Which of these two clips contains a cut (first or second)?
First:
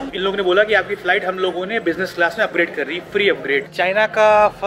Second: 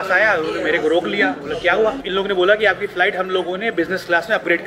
first